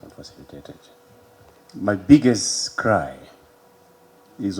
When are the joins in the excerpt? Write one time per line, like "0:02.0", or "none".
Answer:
0:01.5